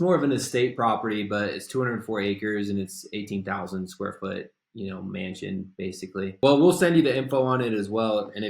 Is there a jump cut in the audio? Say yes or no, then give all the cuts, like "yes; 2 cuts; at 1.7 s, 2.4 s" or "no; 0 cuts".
yes; 1 cut; at 6.3 s